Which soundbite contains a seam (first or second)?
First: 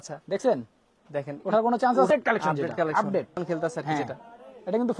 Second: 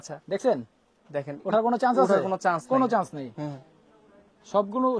first